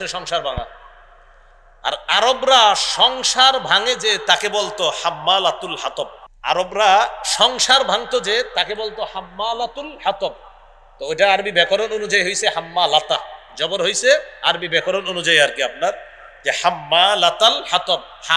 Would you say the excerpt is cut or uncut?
cut